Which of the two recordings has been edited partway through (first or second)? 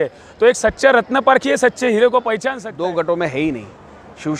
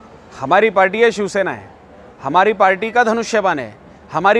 first